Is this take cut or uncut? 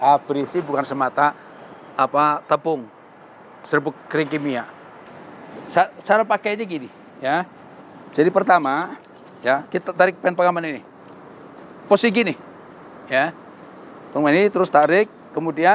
cut